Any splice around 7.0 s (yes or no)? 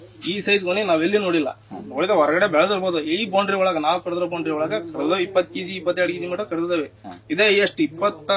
no